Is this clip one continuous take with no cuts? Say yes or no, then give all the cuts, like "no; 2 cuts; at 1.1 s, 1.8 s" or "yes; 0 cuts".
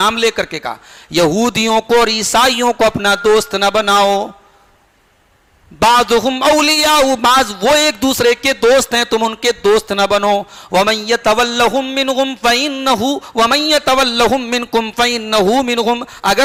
yes; 0 cuts